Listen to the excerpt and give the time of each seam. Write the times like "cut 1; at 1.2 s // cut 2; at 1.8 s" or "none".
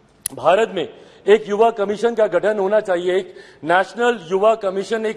none